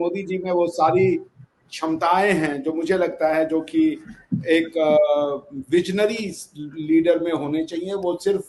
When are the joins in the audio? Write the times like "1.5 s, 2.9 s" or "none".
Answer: none